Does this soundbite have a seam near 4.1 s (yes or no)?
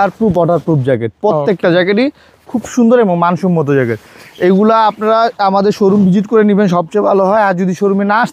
no